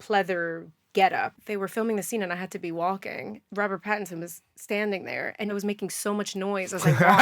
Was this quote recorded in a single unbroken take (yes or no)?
no